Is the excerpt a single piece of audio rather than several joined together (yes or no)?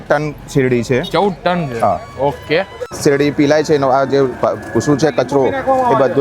no